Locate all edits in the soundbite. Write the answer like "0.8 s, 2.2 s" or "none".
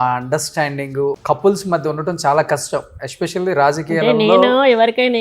1.2 s